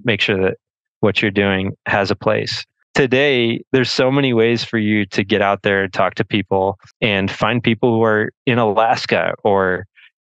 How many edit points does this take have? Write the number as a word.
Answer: two